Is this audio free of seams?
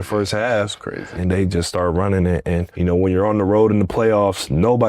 no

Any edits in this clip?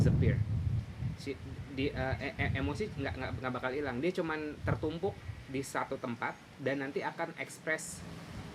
no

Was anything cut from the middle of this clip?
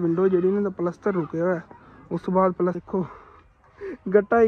yes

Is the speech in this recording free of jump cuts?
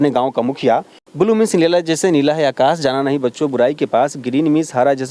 no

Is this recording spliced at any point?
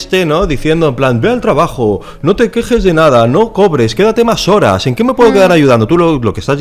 no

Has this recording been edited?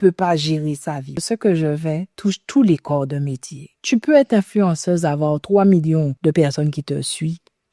yes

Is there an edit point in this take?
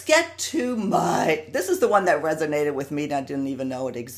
no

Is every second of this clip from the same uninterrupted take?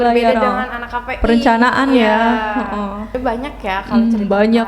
no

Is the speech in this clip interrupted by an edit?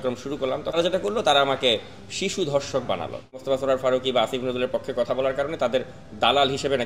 yes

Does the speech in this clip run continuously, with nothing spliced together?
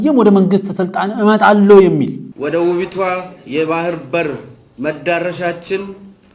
no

